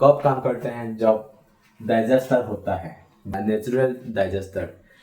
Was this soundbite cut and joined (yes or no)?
yes